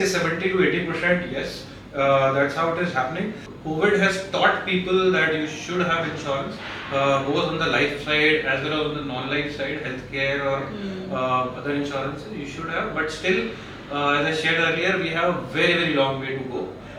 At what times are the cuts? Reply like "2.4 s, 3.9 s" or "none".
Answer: 3.4 s